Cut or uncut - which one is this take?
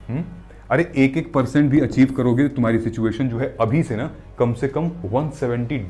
uncut